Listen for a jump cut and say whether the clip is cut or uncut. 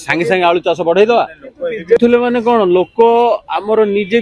cut